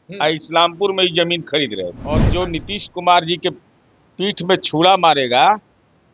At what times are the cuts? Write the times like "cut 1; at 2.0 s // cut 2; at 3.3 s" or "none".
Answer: cut 1; at 2.1 s